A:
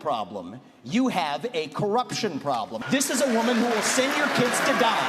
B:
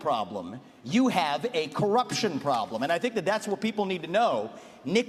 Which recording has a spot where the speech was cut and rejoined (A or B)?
A